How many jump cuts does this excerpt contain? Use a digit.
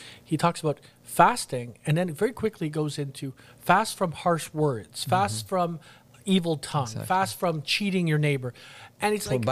0